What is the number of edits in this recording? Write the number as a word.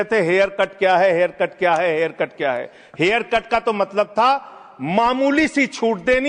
zero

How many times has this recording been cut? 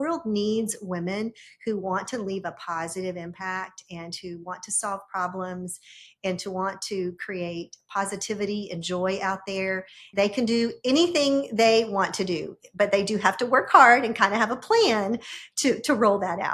one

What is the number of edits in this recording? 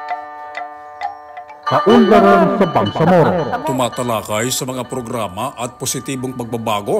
one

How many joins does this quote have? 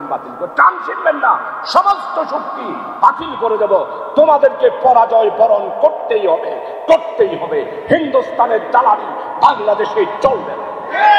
zero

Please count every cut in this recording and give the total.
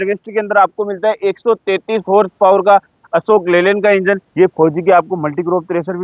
one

